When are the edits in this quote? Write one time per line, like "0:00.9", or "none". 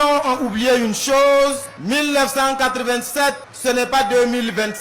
0:01.7
0:03.5